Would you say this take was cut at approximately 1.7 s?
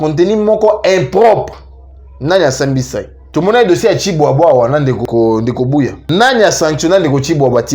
no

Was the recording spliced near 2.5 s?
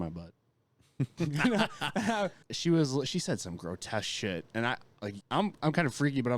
yes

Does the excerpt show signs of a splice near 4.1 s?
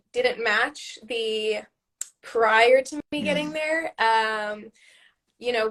no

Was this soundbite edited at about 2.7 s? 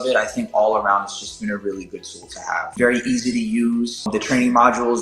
yes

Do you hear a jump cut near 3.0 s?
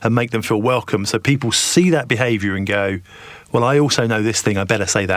no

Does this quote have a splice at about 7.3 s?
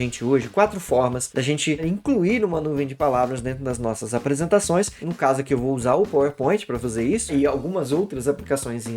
yes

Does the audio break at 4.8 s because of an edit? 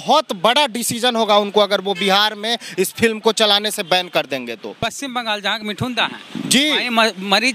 yes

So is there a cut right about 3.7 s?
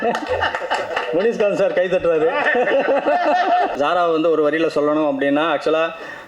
yes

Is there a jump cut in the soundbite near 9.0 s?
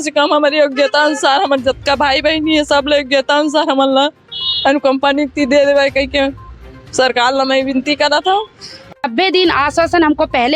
yes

